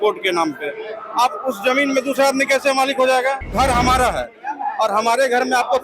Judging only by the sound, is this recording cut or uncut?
cut